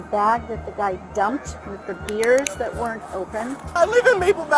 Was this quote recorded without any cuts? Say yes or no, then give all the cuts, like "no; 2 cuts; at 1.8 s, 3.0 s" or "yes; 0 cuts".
no; 1 cut; at 3.6 s